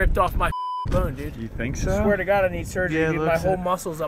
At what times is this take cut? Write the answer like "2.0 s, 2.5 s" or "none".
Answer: none